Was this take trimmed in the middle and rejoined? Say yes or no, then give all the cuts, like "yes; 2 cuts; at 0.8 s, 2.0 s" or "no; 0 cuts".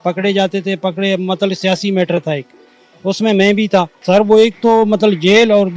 yes; 1 cut; at 3.9 s